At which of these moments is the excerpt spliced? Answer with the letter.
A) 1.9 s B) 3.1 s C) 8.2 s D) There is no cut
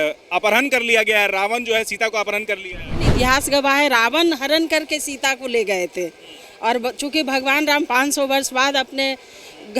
B